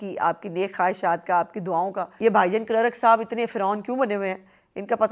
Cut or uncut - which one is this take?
cut